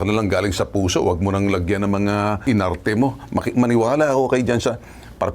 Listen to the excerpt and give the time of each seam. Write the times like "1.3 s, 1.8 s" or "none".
2.4 s